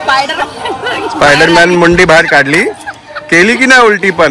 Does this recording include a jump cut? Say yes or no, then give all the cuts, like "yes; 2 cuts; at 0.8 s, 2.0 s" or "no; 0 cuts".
no; 0 cuts